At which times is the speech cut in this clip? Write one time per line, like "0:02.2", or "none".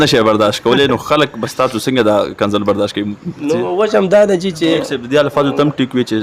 0:04.8